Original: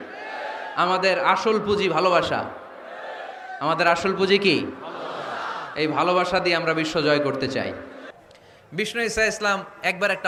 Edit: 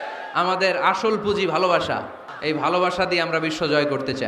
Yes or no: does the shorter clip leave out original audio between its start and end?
yes